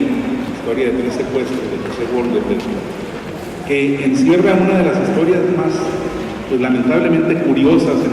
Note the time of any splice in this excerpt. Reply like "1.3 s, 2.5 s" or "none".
6.1 s